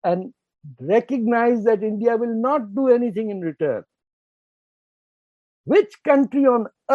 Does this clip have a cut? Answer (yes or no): no